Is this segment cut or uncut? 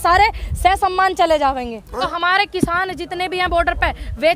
cut